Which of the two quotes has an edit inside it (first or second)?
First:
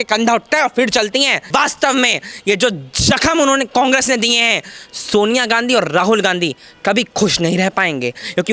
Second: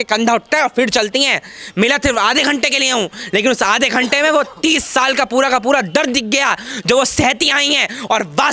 first